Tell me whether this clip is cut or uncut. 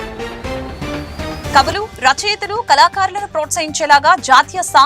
cut